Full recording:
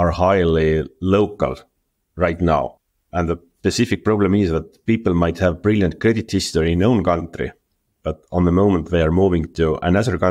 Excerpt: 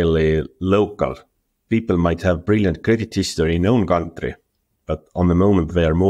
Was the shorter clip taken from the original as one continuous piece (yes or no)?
no